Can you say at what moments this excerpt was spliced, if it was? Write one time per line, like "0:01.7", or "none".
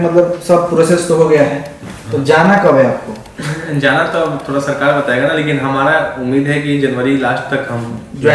none